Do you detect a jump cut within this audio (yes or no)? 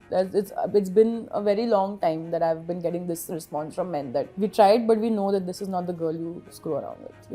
yes